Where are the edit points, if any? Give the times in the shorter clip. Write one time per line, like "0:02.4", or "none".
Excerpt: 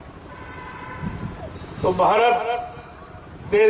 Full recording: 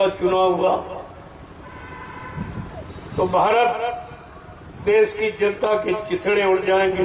none

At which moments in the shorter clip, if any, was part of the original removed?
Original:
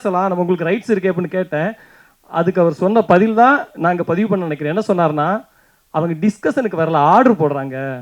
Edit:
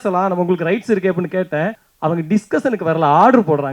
0:01.8

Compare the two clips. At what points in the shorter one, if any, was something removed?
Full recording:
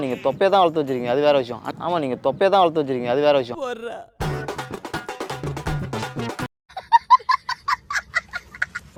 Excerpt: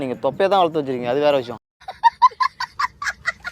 0:01.6

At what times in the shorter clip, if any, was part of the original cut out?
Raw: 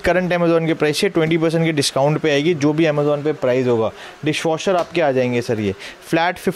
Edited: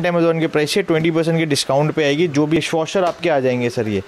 0:02.6

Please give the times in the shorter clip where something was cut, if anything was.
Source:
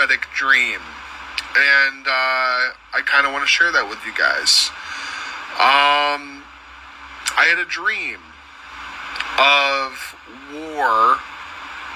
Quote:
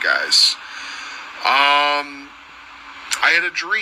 none

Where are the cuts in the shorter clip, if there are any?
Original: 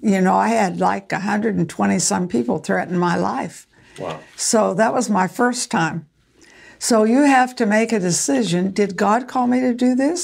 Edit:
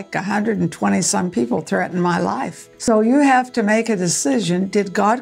0:02.6

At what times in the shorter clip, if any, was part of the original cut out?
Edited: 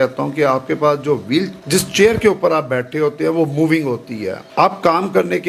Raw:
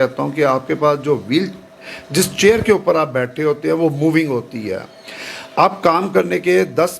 0:01.6
0:04.4

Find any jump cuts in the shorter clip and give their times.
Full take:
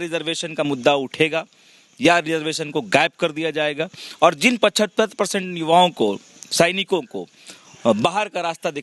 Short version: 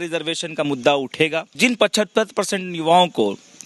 0:01.5

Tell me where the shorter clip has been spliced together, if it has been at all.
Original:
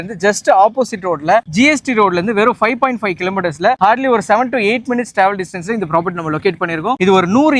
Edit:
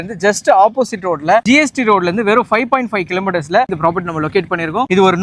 0:01.4
0:03.7

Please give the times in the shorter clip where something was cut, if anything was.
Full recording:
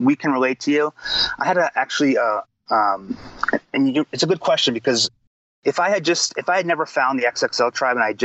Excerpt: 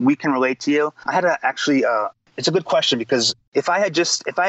0:01.0
0:02.3
0:03.4

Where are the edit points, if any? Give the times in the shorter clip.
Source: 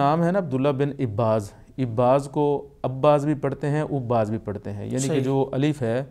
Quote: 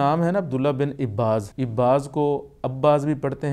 0:01.6

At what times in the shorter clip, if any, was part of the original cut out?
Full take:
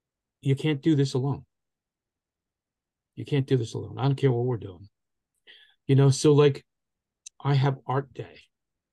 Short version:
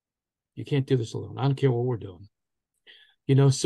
none

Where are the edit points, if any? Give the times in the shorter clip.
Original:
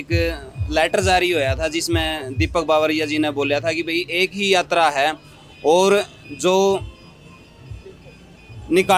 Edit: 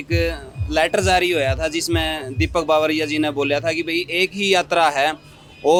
none

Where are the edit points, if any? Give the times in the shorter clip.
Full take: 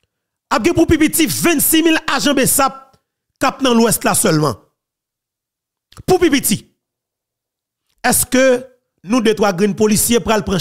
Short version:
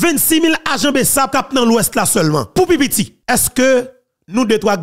0:01.3
0:02.5
0:03.2

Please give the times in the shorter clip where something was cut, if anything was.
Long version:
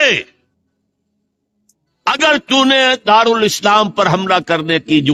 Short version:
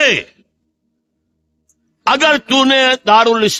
none

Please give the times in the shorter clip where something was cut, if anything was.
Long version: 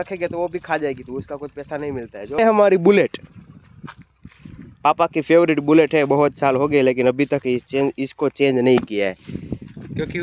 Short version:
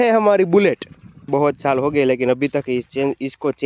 0:01.3

